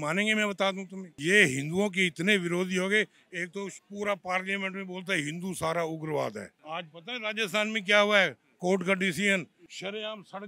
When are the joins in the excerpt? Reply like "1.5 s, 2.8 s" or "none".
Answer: none